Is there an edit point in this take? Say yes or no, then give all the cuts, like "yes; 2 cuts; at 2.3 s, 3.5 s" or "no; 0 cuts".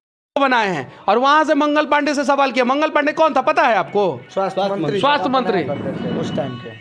no; 0 cuts